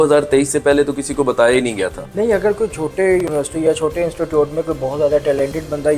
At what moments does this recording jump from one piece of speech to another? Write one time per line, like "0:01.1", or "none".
0:02.0